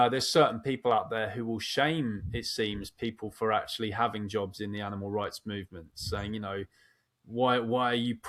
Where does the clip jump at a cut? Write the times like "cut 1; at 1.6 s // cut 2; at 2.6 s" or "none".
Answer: none